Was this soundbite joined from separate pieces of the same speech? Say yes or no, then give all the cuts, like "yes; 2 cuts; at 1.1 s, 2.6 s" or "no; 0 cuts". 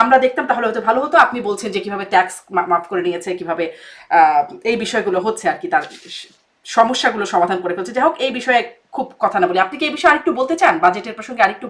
no; 0 cuts